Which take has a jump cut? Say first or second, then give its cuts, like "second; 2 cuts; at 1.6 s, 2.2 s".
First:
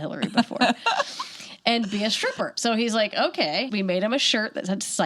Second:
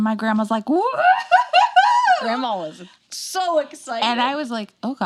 first; 2 cuts; at 2.5 s, 3.7 s